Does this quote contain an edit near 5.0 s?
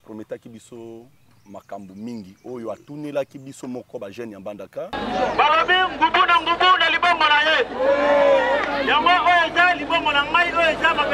yes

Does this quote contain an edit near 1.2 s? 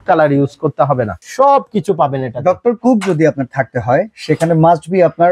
yes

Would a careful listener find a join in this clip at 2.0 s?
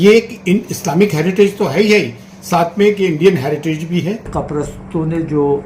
no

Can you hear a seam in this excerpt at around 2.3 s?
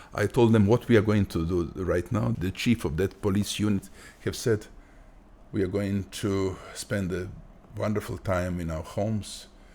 yes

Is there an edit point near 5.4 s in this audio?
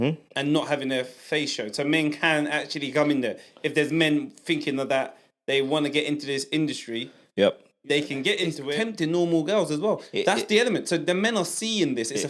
no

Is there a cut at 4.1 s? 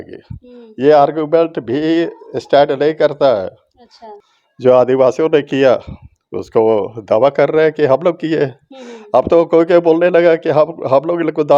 yes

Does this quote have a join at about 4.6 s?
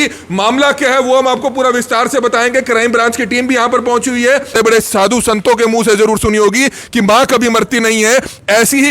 yes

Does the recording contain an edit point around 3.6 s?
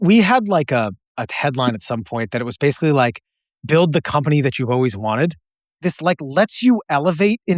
no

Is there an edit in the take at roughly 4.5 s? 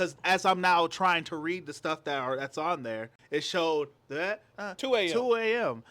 yes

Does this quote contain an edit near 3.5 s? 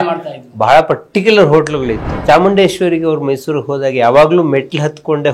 no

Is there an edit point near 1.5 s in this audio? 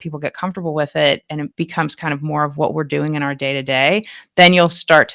yes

